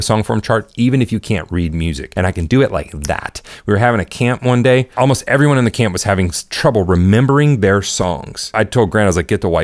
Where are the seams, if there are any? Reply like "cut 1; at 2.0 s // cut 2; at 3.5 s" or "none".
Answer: cut 1; at 2.0 s // cut 2; at 4.9 s // cut 3; at 8.4 s